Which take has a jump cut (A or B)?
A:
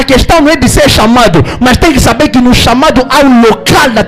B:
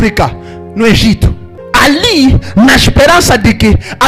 B